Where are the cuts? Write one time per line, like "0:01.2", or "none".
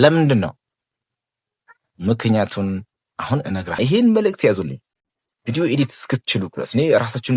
0:03.7